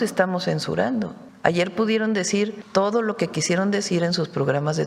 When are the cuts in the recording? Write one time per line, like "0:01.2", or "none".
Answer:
0:01.2
0:02.6